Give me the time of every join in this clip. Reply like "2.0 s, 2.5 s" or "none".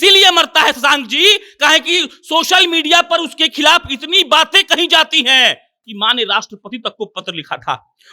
5.9 s